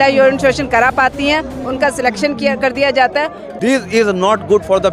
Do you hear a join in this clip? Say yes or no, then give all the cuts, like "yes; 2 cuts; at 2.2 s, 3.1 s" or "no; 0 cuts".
yes; 1 cut; at 3.4 s